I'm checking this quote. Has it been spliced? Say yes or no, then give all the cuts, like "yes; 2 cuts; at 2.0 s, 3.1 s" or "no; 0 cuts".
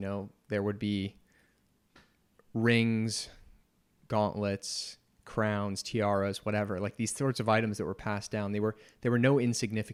no; 0 cuts